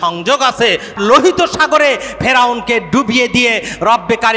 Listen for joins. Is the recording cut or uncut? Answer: cut